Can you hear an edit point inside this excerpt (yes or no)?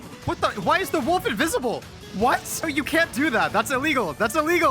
yes